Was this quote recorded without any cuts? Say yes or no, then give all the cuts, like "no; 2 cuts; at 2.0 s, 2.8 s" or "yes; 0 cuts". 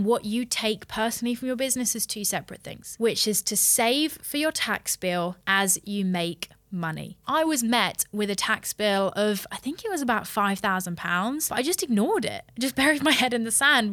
no; 3 cuts; at 2.9 s, 7.2 s, 11.5 s